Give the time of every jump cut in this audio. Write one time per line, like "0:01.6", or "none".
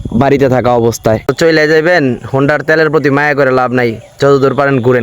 0:01.3